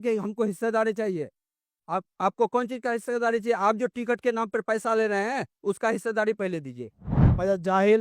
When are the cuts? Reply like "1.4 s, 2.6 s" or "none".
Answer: 7.0 s

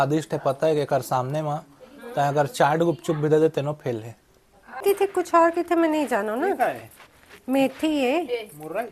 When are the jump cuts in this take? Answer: 4.8 s

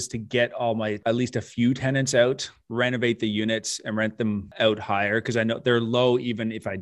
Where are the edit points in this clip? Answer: 1.0 s, 4.5 s

